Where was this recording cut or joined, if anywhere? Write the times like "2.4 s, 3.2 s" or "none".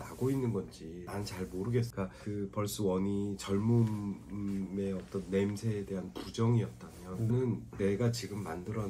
1.0 s, 1.9 s